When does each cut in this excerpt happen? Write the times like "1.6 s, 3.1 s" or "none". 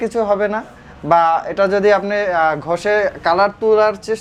none

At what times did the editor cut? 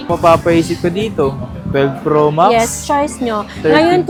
none

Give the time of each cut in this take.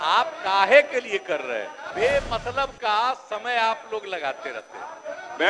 1.8 s

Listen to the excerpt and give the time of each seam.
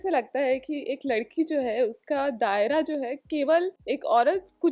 3.8 s

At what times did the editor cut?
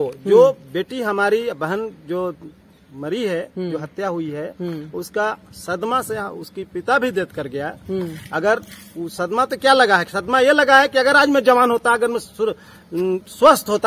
none

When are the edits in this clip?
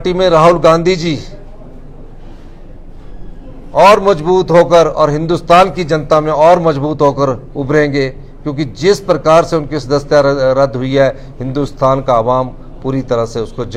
none

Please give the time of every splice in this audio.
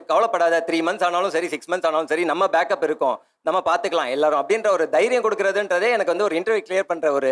none

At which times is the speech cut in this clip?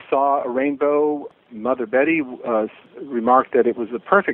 1.3 s, 2.8 s

